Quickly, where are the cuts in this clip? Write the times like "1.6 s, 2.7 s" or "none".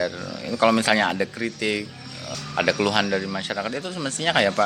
2.2 s